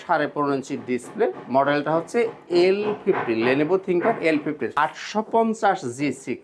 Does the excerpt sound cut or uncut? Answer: cut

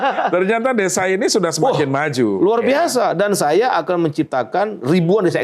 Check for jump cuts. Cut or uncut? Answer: uncut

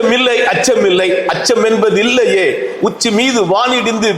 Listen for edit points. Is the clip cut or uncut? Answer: uncut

